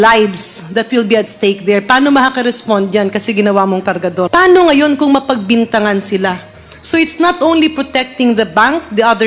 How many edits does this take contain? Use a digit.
1